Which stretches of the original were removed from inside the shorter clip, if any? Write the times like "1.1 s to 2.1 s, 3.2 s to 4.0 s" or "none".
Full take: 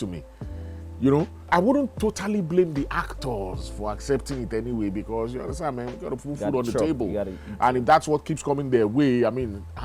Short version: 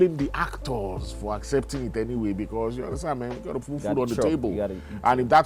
none